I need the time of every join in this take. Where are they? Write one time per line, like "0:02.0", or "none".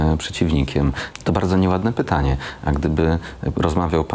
0:01.0

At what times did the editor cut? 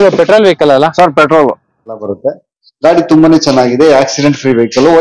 0:02.1

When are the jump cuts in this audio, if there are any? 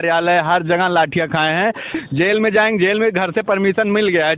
0:01.9

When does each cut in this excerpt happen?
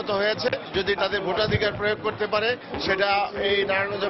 0:00.9

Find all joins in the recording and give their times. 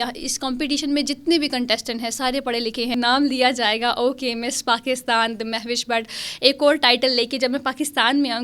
0:02.9

